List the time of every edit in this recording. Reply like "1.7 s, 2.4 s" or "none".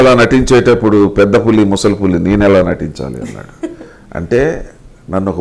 none